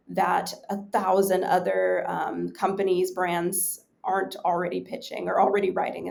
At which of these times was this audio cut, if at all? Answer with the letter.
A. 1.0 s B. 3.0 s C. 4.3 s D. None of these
D